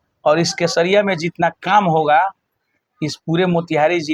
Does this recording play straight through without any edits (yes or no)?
yes